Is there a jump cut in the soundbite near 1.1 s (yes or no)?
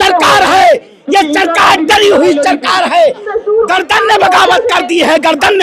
no